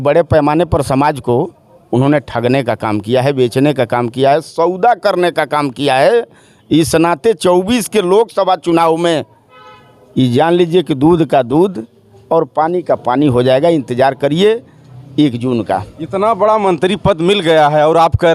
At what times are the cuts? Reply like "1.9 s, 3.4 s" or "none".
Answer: none